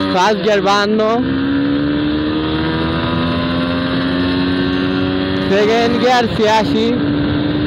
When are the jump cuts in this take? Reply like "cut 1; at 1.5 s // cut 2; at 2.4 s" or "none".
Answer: none